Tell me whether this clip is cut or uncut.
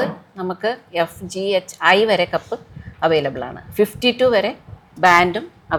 uncut